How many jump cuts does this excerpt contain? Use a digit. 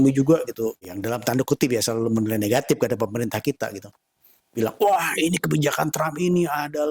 1